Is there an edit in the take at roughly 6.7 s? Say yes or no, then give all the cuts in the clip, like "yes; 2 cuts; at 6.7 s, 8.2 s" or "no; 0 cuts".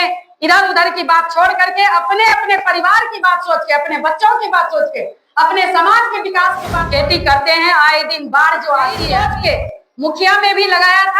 yes; 2 cuts; at 6.7 s, 9.0 s